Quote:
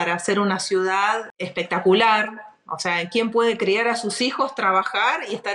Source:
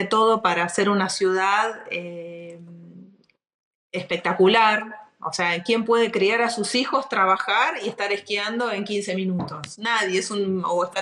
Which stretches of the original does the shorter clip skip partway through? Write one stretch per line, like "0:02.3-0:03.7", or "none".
0:01.8-0:03.9